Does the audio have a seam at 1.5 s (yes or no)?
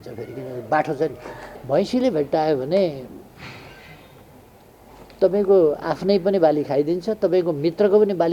yes